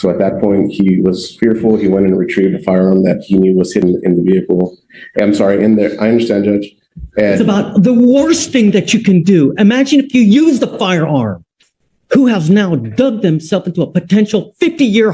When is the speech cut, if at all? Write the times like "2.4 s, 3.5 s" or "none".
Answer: 3.8 s, 12.5 s